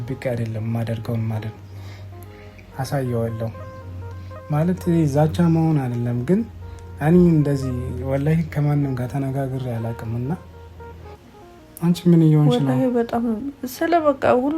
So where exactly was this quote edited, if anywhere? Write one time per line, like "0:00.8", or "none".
0:11.6